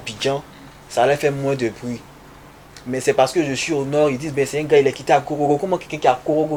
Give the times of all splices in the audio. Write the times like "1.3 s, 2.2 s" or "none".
none